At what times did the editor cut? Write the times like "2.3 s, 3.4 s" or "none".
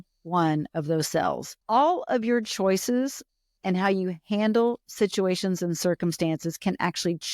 1.6 s